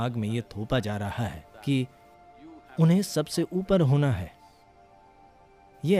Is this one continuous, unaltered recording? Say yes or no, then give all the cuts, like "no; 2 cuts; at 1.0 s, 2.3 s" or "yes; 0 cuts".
yes; 0 cuts